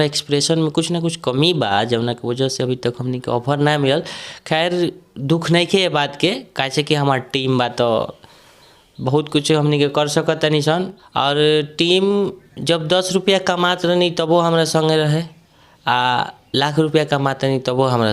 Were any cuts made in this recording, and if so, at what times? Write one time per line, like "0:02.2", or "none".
0:11.0